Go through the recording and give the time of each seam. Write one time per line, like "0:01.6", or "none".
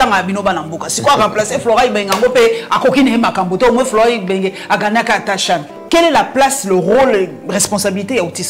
0:05.8